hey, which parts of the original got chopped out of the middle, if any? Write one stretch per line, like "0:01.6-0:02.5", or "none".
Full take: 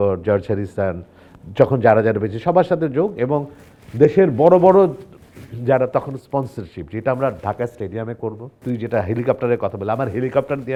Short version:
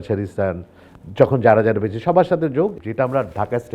0:03.1-0:06.8